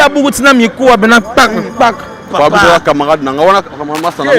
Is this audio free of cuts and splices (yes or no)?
no